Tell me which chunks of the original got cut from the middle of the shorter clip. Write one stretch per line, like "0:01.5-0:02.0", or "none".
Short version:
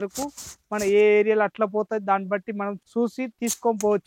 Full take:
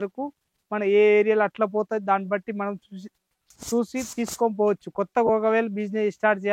0:02.8-0:03.6